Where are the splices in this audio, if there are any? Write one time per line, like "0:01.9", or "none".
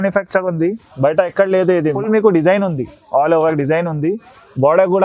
0:02.0